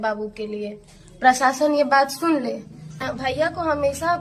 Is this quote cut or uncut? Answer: cut